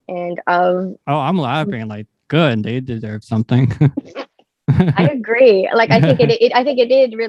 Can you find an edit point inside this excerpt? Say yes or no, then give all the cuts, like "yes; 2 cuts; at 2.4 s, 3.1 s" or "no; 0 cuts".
no; 0 cuts